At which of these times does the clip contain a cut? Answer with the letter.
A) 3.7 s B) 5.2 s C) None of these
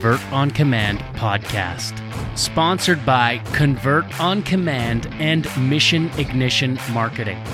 C